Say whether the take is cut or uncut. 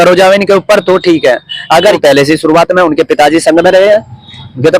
cut